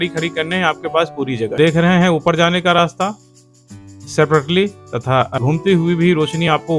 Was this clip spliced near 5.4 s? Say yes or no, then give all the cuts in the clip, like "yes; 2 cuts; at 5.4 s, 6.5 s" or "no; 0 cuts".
yes; 2 cuts; at 1.5 s, 5.4 s